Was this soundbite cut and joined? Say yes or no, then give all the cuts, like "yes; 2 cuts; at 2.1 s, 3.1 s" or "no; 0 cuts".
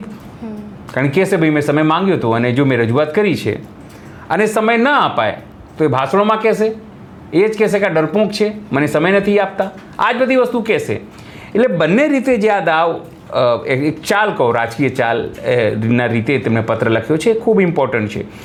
no; 0 cuts